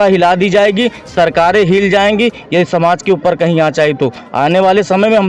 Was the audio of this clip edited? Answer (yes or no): no